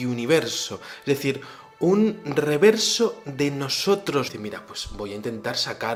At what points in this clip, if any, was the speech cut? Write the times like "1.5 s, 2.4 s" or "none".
none